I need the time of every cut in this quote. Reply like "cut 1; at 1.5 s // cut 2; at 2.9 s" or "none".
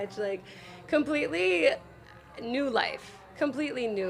none

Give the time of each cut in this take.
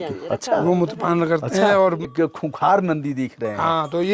cut 1; at 2.1 s

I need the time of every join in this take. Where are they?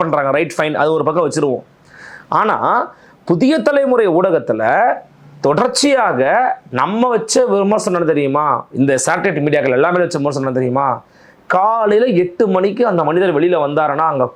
none

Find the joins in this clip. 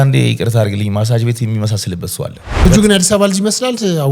cut 1; at 2.7 s

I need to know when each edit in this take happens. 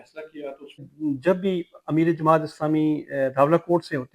cut 1; at 0.9 s

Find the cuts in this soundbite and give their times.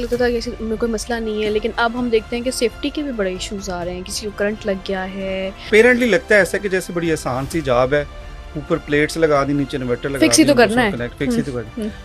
cut 1; at 5.6 s

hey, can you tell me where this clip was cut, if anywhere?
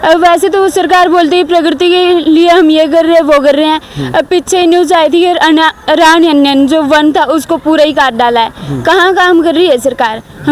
none

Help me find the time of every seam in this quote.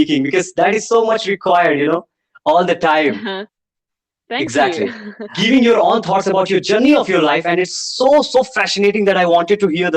cut 1; at 5.3 s

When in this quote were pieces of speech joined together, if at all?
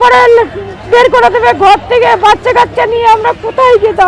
none

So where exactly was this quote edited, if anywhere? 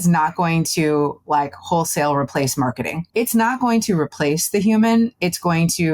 cut 1; at 2.9 s

